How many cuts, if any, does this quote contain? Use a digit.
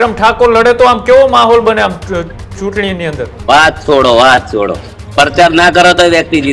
1